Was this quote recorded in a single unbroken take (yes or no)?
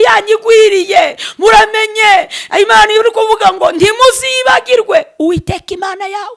yes